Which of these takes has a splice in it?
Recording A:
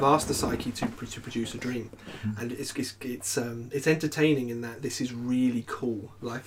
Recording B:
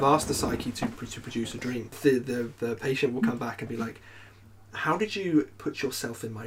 B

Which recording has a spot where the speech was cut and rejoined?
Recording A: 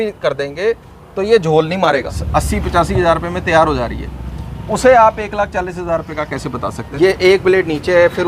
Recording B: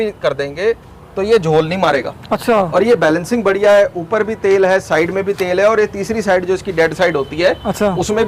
A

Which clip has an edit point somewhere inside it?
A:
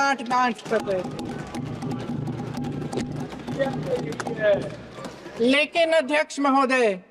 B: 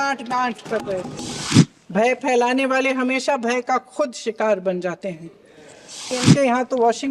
B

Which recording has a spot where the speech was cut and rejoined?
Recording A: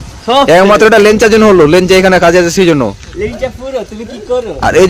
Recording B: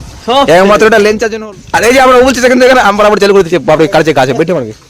B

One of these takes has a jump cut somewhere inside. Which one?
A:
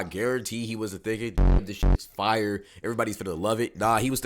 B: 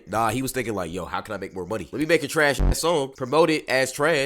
A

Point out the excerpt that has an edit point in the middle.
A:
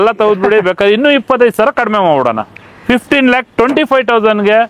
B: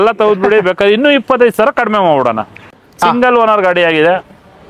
B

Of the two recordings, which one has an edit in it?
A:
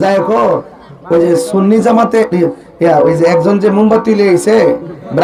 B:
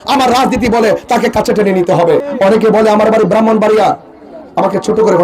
B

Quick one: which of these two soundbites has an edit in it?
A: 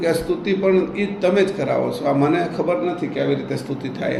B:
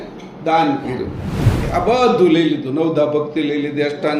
B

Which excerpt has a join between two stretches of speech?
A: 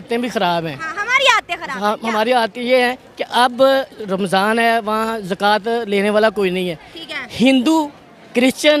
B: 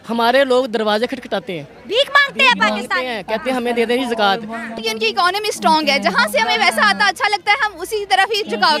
B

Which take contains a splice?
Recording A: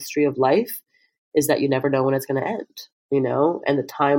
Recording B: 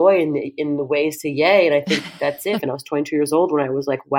B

